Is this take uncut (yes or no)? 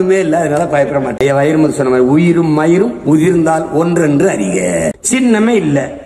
no